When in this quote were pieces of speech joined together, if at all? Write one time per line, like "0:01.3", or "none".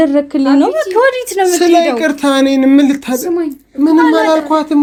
none